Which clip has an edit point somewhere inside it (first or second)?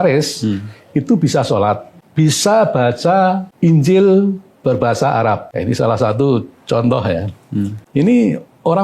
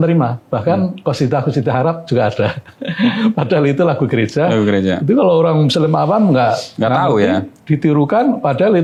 first